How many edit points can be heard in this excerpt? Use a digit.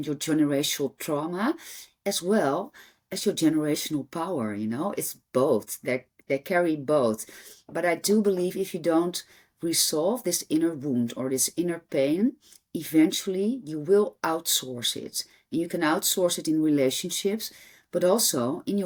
0